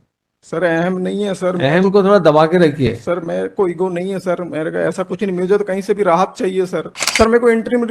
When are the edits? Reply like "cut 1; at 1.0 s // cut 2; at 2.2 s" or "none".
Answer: cut 1; at 7.0 s